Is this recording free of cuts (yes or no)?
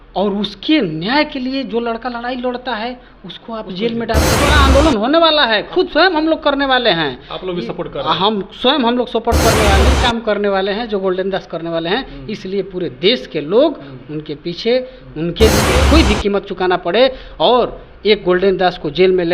no